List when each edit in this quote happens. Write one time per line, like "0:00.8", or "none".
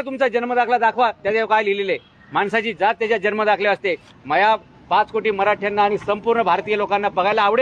none